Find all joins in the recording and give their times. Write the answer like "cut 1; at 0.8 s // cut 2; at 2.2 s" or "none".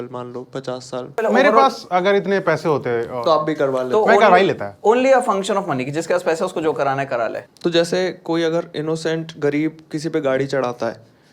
cut 1; at 1.2 s // cut 2; at 7.5 s